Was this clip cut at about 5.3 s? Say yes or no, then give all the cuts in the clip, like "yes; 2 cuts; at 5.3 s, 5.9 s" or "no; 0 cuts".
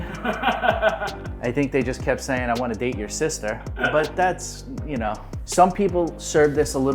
yes; 1 cut; at 5.3 s